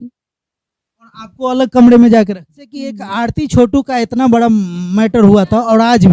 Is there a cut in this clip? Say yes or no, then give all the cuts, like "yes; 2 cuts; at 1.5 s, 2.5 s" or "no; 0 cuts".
yes; 1 cut; at 3.0 s